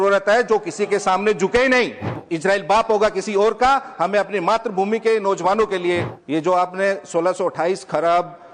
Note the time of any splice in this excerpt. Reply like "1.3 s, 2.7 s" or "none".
2.2 s, 6.1 s